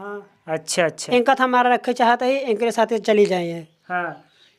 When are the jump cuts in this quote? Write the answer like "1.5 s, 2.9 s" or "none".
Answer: 1.0 s